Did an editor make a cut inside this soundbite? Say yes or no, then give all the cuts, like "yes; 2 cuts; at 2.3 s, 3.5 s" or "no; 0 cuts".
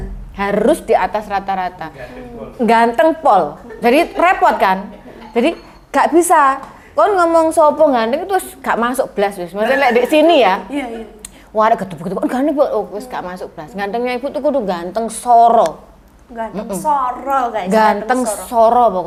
no; 0 cuts